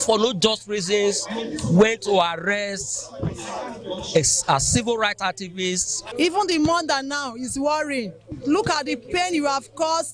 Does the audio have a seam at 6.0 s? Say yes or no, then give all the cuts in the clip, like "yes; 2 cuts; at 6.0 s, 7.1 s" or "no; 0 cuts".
yes; 1 cut; at 6.0 s